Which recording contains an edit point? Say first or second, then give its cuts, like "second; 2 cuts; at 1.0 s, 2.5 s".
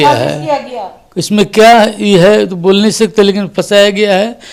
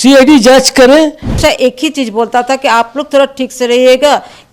second; 1 cut; at 1.4 s